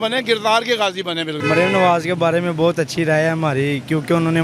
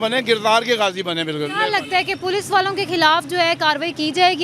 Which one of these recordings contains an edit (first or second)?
first